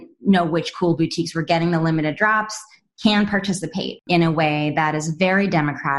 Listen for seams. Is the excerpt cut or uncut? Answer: cut